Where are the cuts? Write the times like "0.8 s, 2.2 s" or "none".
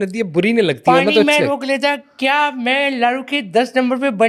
none